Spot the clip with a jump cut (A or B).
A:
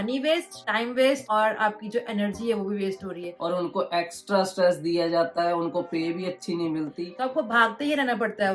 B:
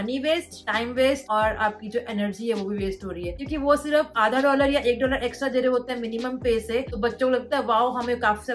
A